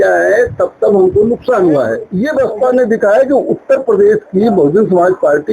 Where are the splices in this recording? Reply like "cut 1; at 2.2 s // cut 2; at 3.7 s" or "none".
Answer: cut 1; at 2.1 s